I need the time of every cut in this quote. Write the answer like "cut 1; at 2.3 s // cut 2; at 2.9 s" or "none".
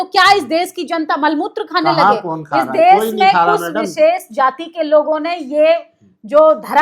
none